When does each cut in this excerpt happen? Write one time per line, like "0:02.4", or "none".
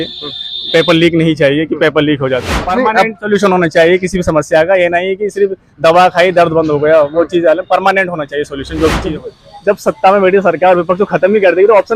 0:02.6
0:09.1